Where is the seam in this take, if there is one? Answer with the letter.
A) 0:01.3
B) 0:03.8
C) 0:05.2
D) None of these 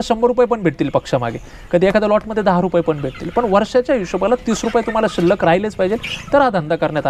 D